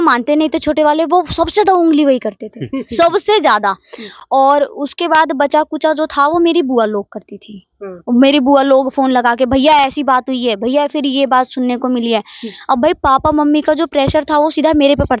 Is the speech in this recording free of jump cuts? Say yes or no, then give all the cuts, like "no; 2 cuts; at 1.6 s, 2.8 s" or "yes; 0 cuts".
yes; 0 cuts